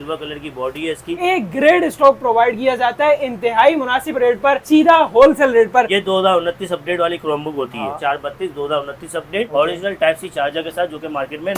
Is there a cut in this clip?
yes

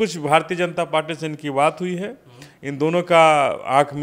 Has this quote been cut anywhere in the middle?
no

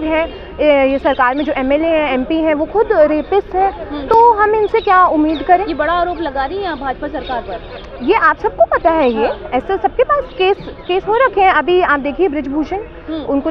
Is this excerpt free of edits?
yes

